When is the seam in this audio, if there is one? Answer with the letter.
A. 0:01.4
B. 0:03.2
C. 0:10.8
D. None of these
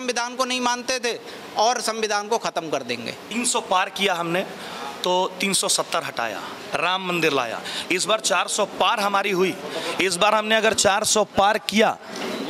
B